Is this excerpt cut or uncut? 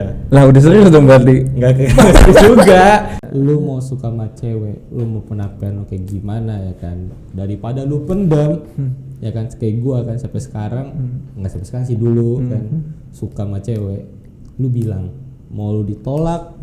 cut